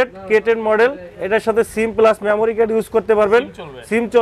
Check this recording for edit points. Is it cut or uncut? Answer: uncut